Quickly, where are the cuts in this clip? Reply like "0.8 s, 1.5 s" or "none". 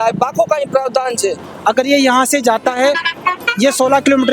1.4 s